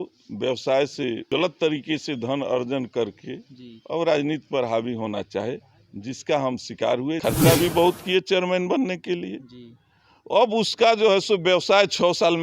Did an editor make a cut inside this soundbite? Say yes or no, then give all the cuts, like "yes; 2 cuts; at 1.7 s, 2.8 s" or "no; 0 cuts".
yes; 2 cuts; at 1.3 s, 7.2 s